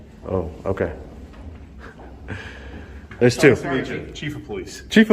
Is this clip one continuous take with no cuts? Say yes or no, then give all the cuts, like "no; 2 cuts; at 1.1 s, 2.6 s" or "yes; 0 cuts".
no; 1 cut; at 3.2 s